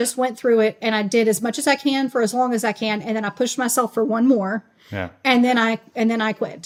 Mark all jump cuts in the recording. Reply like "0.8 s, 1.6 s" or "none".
none

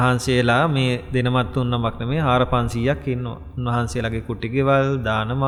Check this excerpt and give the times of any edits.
none

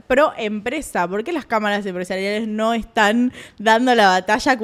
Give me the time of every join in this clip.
none

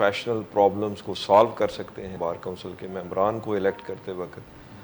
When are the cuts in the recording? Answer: 2.1 s

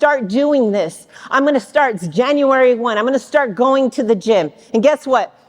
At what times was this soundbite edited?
none

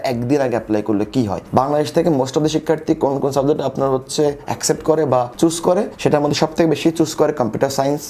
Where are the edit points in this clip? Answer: 1.4 s

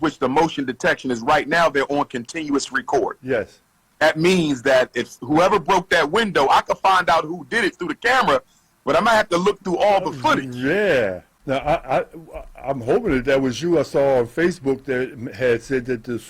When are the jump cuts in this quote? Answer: 11.3 s

